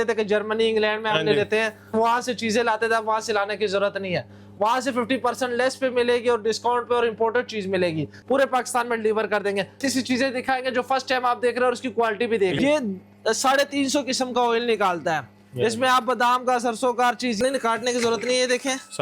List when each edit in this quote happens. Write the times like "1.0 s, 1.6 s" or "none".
1.9 s, 8.1 s, 9.8 s, 12.6 s, 17.4 s